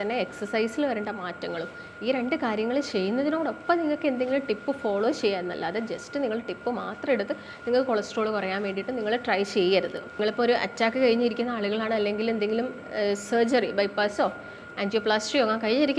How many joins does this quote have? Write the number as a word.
one